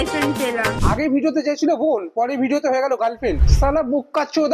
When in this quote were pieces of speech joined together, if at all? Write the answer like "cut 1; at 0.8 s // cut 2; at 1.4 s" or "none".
cut 1; at 0.7 s // cut 2; at 3.4 s

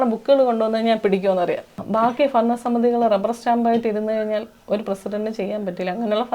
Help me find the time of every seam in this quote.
cut 1; at 1.8 s

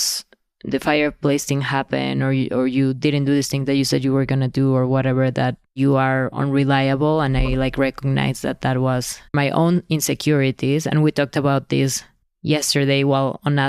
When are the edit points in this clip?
cut 1; at 5.6 s

